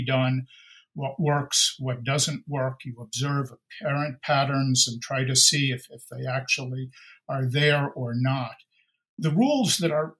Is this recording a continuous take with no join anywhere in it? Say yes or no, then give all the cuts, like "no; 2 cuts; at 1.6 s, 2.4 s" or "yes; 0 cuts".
no; 1 cut; at 9.2 s